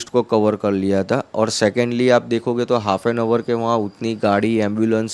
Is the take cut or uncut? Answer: uncut